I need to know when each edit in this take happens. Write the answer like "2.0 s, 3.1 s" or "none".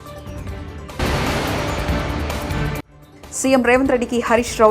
1.0 s